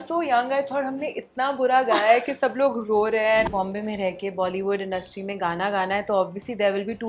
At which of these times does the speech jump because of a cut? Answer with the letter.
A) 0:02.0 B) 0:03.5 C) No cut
B